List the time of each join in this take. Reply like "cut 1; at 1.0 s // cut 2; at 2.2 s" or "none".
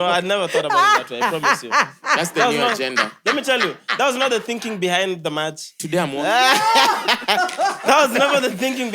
none